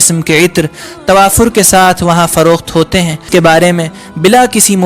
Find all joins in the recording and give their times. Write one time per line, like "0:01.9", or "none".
0:03.2